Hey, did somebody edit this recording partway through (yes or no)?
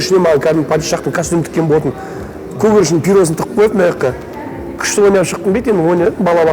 no